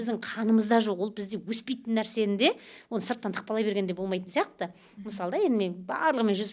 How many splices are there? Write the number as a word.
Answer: zero